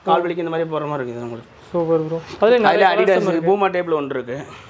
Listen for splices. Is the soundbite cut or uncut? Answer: uncut